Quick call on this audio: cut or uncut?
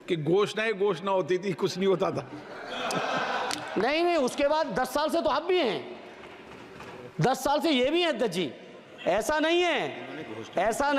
uncut